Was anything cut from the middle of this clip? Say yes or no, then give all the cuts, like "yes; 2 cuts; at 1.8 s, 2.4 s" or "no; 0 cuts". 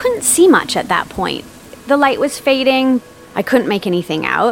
yes; 1 cut; at 3.0 s